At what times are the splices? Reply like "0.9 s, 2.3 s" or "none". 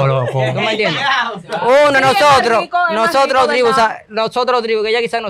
none